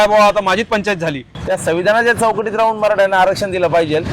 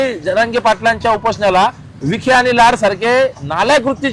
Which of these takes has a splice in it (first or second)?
first